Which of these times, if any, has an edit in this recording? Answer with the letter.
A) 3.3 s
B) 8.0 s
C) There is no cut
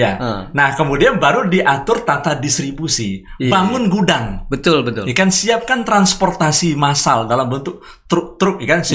C